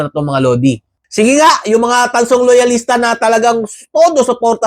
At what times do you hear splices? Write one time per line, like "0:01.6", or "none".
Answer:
0:01.0